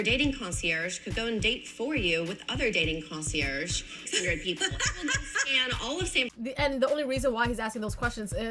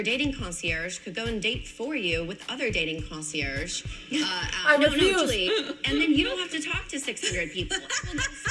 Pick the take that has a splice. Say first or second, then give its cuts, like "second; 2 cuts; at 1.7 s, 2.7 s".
first; 2 cuts; at 3.9 s, 6.3 s